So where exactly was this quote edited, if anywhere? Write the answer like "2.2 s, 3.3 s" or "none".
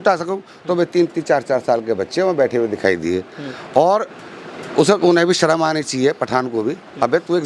none